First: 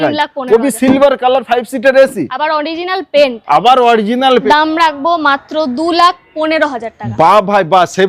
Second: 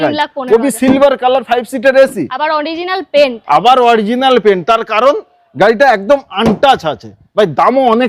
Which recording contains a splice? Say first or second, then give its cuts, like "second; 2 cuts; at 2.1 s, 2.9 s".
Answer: first; 1 cut; at 4.4 s